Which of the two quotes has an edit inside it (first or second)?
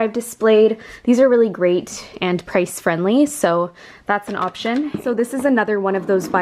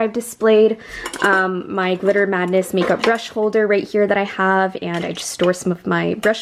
first